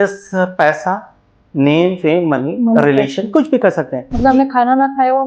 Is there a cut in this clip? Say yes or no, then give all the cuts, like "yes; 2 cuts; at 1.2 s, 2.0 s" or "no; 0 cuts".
yes; 1 cut; at 4.1 s